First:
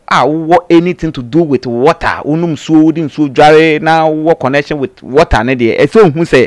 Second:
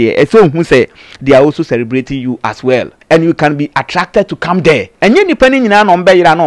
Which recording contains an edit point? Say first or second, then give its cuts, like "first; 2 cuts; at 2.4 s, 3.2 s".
second; 2 cuts; at 2.9 s, 4.9 s